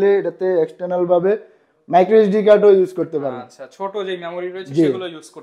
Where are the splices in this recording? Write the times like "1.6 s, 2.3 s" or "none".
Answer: none